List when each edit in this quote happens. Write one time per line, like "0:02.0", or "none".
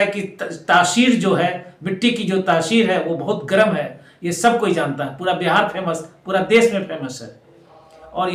none